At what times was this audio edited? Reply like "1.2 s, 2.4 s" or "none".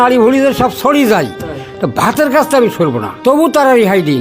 3.1 s